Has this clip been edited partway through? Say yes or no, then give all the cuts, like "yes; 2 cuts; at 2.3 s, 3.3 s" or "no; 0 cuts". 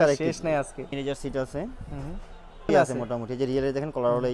yes; 2 cuts; at 0.9 s, 2.7 s